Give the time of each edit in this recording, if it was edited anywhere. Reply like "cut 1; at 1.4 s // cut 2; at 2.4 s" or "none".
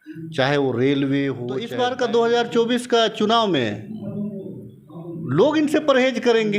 cut 1; at 1.7 s